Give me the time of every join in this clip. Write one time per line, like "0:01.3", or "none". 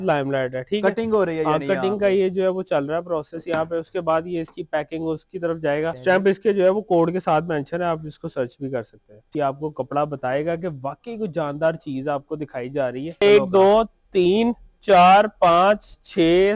0:05.9
0:09.2
0:13.2